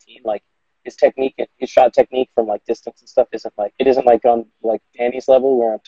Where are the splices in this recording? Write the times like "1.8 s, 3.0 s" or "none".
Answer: 3.7 s